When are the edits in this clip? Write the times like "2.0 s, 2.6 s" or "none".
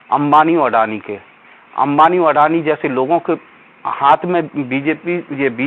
none

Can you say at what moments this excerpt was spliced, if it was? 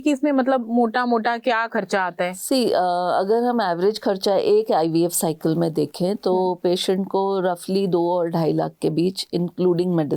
none

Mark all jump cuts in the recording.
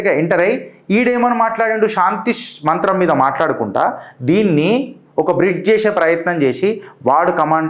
none

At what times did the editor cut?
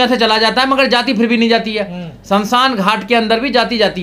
none

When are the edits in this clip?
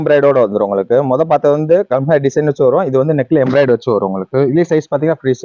none

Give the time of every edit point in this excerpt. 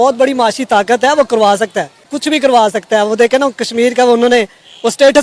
2.1 s

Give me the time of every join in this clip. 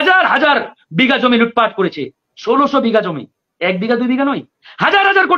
none

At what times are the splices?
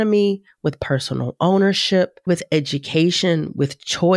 2.3 s

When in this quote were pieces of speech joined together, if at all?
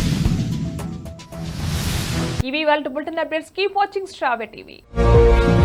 none

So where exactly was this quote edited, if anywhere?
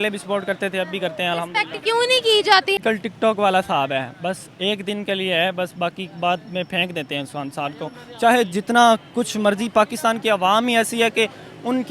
2.8 s

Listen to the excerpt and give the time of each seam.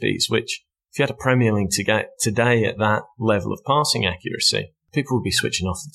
4.8 s

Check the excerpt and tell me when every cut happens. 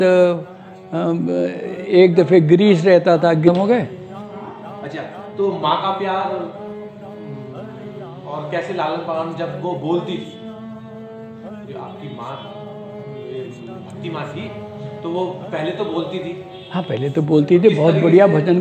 3.5 s

